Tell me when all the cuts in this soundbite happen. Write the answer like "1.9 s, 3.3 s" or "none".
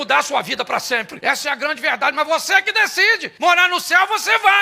1.1 s, 3.2 s